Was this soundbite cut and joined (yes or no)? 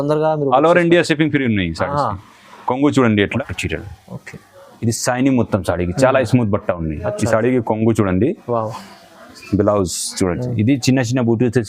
yes